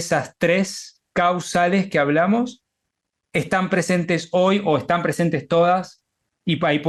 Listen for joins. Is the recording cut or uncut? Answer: uncut